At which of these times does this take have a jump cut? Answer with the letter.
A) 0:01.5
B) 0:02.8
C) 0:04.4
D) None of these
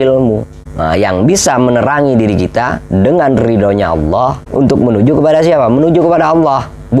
C